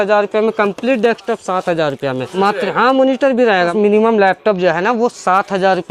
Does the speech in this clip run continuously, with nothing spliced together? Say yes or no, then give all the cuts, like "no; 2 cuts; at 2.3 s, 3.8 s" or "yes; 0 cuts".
no; 2 cuts; at 2.3 s, 3.7 s